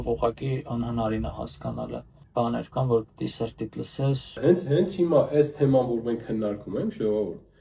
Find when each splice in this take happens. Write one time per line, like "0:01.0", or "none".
0:02.2
0:04.4